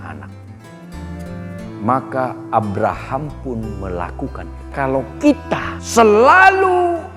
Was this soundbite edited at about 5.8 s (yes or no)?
yes